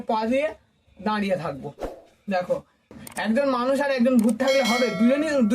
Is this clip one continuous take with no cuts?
no; 1 cut; at 2.9 s

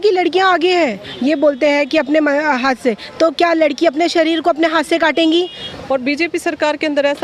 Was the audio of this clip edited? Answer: yes; 2 cuts; at 1.1 s, 5.6 s

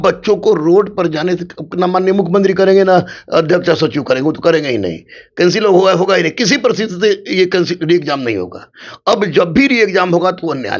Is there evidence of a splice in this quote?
no; 0 cuts

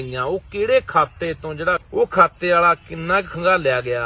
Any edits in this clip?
yes; 1 cut; at 1.8 s

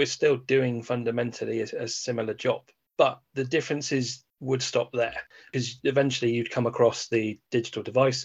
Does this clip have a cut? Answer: yes; 1 cut; at 5.4 s

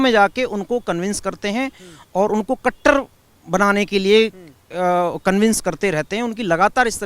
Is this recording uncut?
yes; 0 cuts

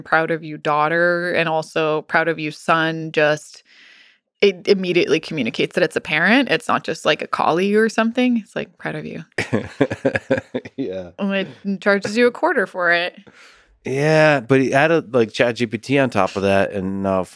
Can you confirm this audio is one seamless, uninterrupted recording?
yes; 0 cuts

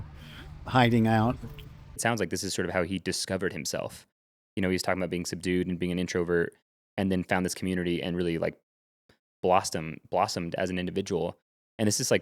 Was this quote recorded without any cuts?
no; 1 cut; at 2.0 s

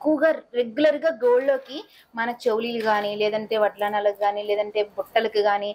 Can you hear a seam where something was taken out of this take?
no; 0 cuts

